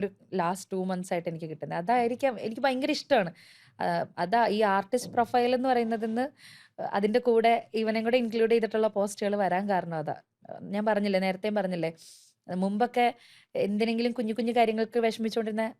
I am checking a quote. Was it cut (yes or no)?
no